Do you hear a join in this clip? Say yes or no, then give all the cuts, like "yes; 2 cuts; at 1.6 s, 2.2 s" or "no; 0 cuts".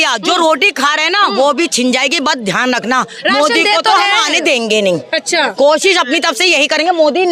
no; 0 cuts